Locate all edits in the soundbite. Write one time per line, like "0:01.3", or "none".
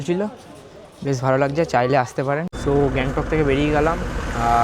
0:02.5